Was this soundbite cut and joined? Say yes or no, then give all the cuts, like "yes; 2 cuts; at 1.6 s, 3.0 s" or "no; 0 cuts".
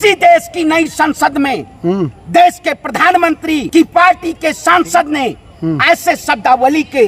yes; 1 cut; at 3.6 s